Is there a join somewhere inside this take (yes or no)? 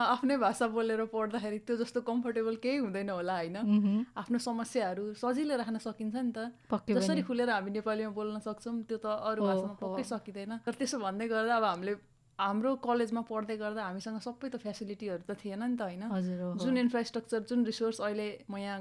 no